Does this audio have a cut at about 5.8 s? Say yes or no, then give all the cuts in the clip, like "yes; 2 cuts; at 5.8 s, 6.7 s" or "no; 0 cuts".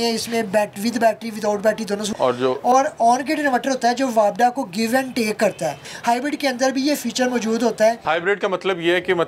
yes; 3 cuts; at 2.1 s, 5.8 s, 8.0 s